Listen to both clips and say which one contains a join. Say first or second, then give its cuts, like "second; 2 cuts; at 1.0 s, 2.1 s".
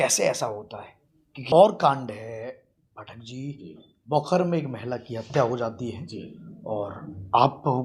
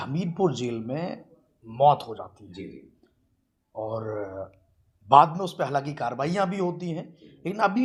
first; 1 cut; at 1.5 s